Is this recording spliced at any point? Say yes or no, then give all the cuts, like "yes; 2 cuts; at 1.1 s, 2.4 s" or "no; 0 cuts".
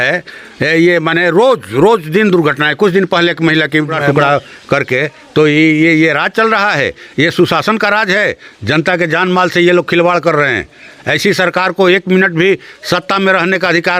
yes; 1 cut; at 4.0 s